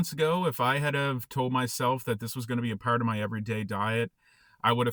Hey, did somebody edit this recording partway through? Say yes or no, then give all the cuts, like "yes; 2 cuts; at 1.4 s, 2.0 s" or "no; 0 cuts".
no; 0 cuts